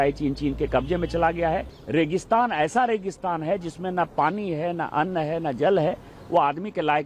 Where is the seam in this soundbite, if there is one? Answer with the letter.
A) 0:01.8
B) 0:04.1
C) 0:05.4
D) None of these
A